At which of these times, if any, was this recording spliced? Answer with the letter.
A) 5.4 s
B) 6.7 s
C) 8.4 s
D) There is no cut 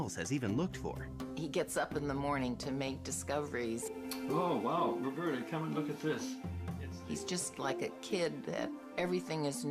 C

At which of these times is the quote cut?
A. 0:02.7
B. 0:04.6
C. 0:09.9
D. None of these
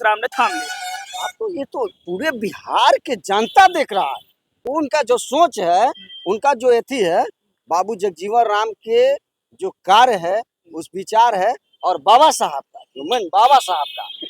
B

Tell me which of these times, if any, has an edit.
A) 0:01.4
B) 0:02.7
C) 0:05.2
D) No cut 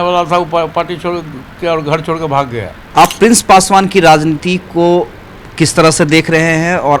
B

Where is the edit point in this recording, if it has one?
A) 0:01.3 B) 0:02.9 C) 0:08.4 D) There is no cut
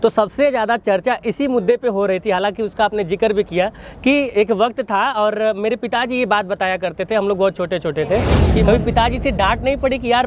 C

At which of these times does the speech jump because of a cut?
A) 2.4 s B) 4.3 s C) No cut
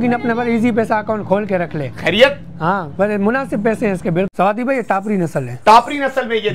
B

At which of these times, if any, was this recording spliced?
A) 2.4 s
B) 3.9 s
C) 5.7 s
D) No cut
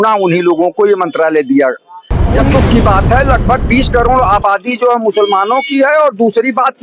A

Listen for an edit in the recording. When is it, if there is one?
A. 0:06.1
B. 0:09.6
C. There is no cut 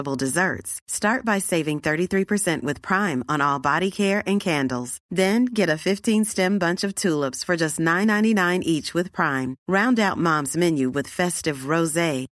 C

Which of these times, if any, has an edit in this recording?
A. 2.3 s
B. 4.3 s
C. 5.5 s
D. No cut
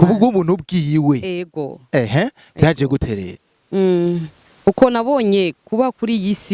D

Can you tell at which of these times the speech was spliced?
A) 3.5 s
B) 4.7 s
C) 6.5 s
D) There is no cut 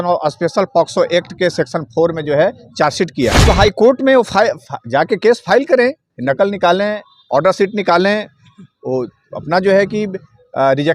A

